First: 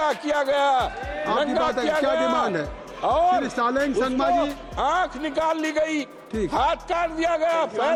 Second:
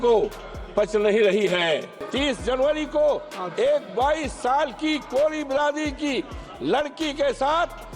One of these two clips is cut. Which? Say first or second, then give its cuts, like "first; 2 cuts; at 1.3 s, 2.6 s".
second; 1 cut; at 2.0 s